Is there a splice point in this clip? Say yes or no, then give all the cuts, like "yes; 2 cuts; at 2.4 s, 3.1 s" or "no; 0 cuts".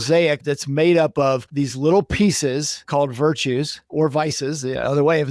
yes; 1 cut; at 2.8 s